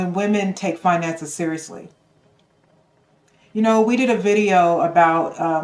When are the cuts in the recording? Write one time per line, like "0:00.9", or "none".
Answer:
none